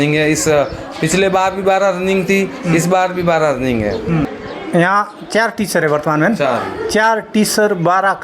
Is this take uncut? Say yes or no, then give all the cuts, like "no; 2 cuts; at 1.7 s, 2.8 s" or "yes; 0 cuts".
no; 1 cut; at 4.3 s